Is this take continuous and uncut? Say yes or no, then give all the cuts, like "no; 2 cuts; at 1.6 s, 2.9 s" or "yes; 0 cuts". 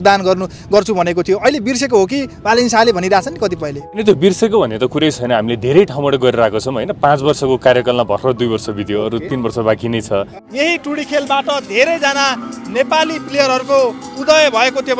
no; 2 cuts; at 4.0 s, 10.3 s